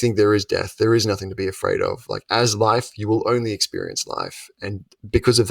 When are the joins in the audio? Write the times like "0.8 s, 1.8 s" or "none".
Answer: none